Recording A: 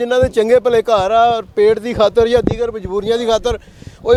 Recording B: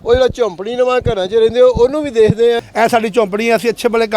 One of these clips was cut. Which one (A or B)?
B